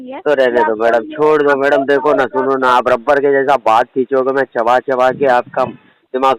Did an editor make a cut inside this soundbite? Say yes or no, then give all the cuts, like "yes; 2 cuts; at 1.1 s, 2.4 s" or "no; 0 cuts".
no; 0 cuts